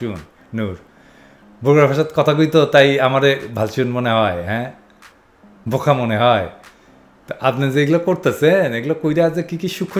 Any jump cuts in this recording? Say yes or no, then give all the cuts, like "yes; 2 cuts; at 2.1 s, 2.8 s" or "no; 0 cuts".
no; 0 cuts